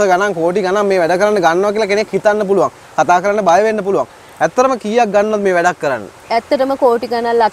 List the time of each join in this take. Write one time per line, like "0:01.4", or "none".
none